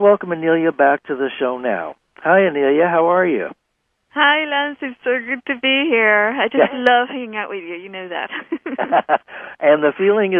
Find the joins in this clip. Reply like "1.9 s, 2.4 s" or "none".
none